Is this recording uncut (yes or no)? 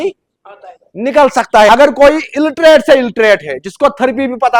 no